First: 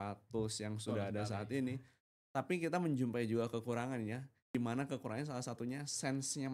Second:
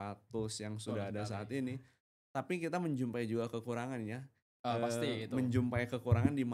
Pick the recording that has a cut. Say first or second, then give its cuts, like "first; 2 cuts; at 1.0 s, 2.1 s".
first; 1 cut; at 4.5 s